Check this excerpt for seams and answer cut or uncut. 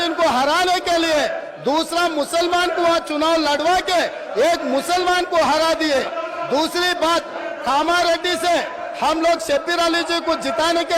uncut